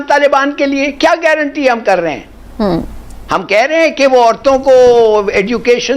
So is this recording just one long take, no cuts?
yes; 0 cuts

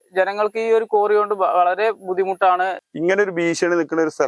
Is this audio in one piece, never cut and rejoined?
no; 1 cut; at 2.8 s

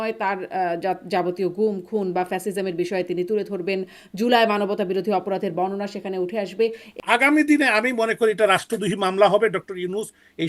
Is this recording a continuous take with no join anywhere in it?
no; 1 cut; at 6.8 s

